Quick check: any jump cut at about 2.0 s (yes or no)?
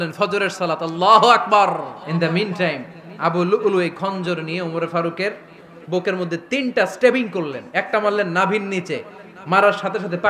yes